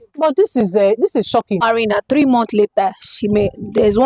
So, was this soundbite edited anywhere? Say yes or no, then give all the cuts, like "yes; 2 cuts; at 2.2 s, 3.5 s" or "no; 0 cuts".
yes; 1 cut; at 1.6 s